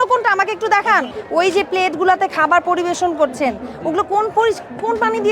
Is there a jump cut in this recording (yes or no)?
yes